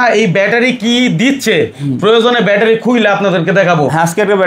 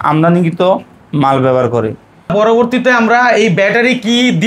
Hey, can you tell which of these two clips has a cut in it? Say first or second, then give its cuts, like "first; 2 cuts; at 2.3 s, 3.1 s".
second; 1 cut; at 2.3 s